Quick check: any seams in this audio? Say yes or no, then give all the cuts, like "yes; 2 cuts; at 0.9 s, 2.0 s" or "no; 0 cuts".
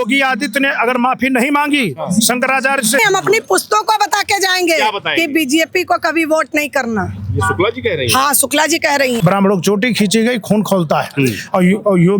yes; 2 cuts; at 3.0 s, 9.2 s